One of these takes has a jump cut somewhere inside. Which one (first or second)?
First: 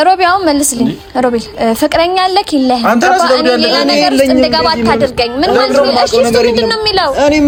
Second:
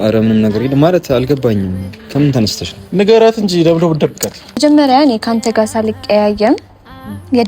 second